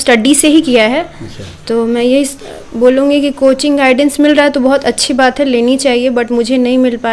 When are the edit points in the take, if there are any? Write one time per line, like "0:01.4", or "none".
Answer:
none